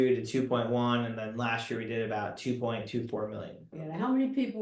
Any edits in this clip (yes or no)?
yes